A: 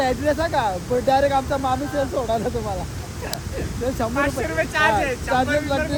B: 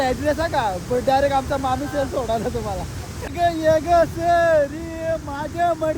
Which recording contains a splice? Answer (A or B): B